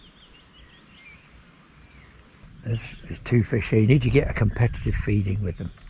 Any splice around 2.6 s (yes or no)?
yes